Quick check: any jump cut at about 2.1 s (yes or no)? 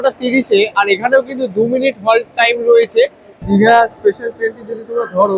no